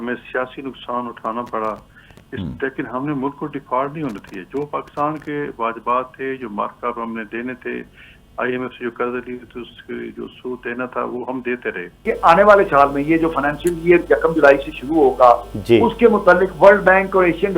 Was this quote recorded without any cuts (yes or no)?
no